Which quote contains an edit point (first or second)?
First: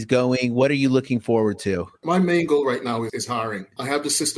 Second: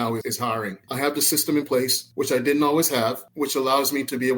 first